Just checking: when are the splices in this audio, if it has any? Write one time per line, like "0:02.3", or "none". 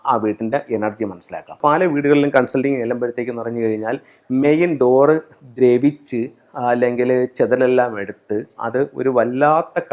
0:01.6